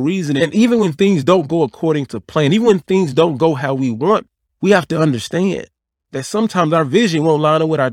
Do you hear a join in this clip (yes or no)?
yes